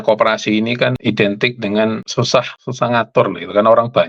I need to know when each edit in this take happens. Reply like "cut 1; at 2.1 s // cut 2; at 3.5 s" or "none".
cut 1; at 1.0 s // cut 2; at 2.3 s